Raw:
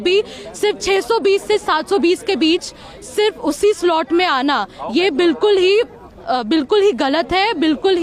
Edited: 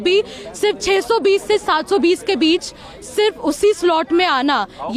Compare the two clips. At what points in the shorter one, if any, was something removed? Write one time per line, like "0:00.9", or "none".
none